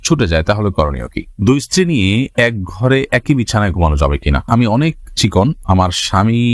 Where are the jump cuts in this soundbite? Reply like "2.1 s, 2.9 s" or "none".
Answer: 1.2 s, 4.4 s